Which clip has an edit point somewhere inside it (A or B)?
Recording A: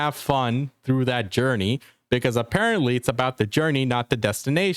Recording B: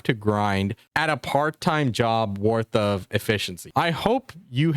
B